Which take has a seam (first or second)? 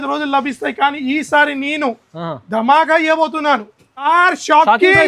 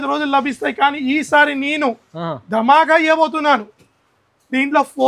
first